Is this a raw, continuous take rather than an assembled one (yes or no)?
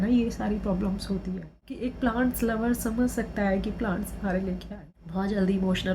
no